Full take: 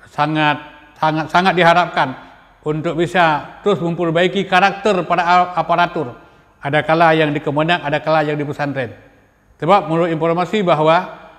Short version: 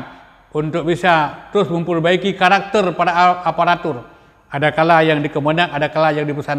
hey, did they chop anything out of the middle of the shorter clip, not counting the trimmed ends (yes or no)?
no